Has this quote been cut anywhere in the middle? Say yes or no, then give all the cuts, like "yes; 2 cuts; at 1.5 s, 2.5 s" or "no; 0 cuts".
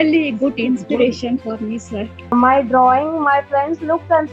yes; 1 cut; at 2.3 s